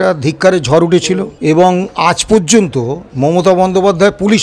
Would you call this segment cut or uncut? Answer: cut